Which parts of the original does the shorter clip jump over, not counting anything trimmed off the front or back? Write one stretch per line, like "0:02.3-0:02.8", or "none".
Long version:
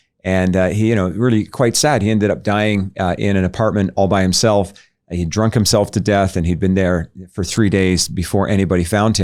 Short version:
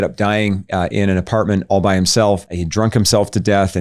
0:04.8-0:05.2